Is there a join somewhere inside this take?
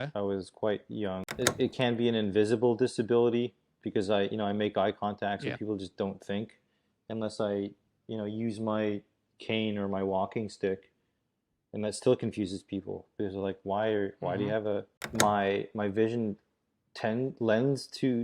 yes; 2 cuts; at 1.3 s, 15.0 s

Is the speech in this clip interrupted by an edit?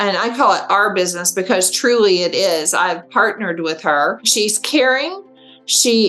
yes; 1 cut; at 4.2 s

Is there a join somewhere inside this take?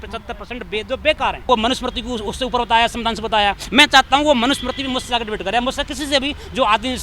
yes; 1 cut; at 1.5 s

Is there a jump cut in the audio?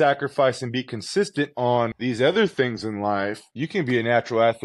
yes; 2 cuts; at 2.0 s, 3.5 s

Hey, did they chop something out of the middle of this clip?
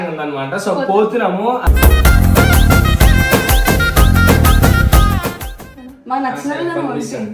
yes; 1 cut; at 5.4 s

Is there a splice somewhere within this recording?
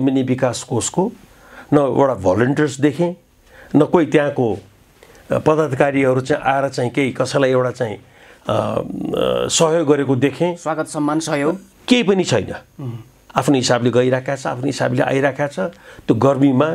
no; 0 cuts

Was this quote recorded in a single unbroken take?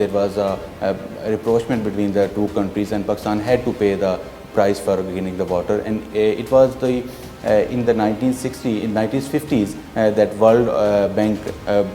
yes; 0 cuts

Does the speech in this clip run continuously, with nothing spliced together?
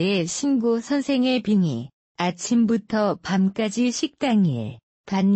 no; 1 cut; at 4.4 s

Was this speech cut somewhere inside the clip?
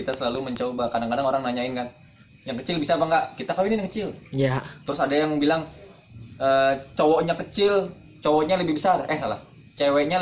no; 0 cuts

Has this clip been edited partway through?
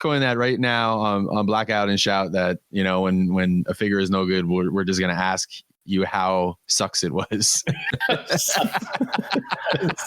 yes; 2 cuts; at 2.6 s, 6.6 s

